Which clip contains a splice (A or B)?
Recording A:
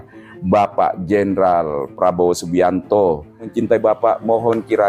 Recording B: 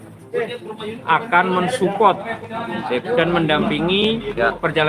A